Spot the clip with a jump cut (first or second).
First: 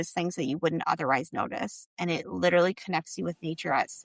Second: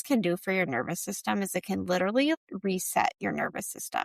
second